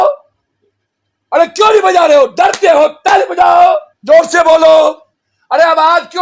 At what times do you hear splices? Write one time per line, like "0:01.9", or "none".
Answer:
0:03.9